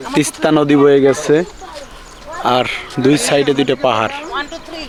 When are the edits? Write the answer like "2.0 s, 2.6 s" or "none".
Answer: none